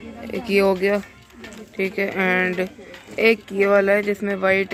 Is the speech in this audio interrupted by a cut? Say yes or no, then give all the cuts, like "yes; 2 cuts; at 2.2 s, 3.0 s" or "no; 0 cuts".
no; 0 cuts